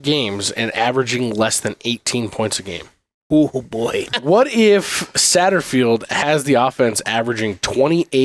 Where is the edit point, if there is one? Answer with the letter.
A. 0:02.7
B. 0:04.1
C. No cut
B